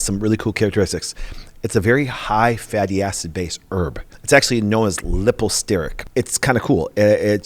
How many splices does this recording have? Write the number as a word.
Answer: two